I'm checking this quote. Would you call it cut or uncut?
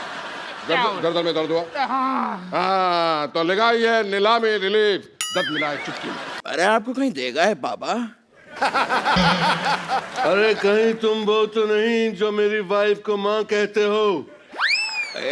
cut